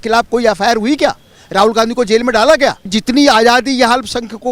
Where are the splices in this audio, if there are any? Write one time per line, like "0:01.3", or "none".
0:02.9